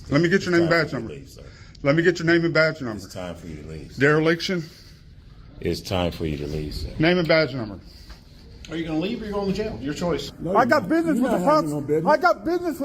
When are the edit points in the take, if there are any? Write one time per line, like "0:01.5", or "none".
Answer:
0:10.3